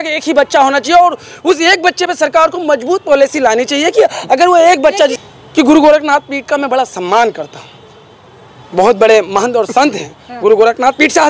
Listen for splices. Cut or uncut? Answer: uncut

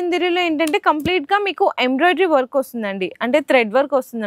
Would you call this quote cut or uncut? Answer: uncut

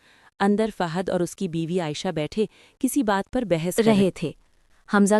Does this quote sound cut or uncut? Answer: cut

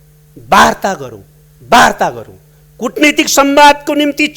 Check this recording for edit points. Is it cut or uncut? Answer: uncut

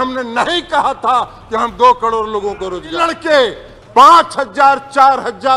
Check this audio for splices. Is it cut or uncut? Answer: cut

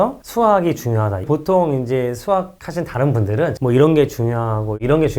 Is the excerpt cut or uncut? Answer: cut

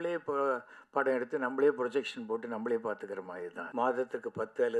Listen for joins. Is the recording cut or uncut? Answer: cut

